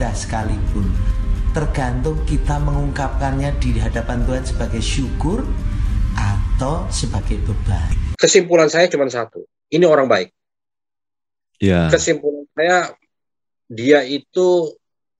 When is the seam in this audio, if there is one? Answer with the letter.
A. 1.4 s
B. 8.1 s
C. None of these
B